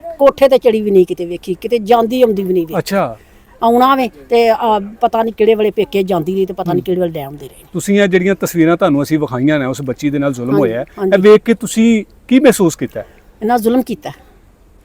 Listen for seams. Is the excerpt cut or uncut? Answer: uncut